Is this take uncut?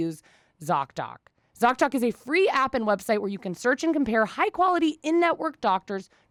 yes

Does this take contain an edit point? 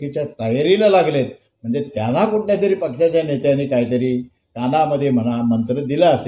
no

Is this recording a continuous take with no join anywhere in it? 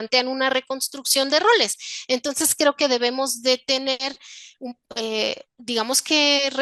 yes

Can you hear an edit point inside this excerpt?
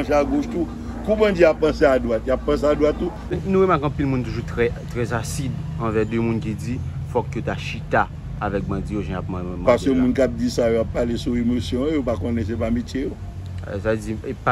yes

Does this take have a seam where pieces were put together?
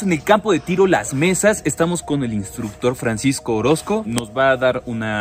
no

